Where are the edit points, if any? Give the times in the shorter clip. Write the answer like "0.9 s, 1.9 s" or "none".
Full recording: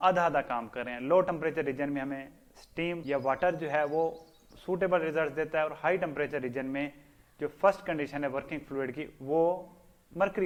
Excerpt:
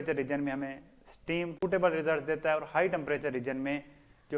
1.5 s